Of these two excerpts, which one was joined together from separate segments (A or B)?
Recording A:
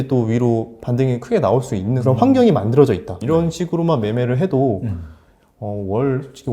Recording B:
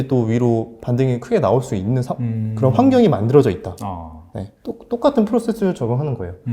A